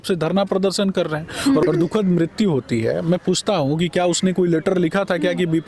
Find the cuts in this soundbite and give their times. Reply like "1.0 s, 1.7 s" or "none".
1.6 s